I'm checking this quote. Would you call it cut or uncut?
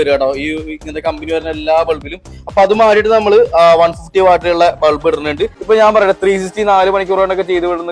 cut